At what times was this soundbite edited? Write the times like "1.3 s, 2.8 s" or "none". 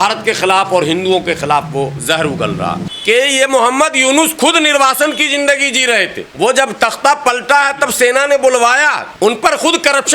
2.9 s, 6.2 s